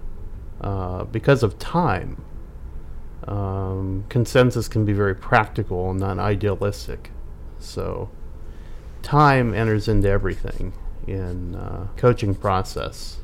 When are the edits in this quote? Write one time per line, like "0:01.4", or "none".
0:11.9